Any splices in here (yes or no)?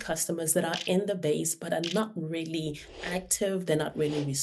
no